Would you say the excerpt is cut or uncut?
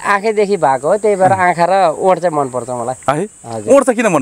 uncut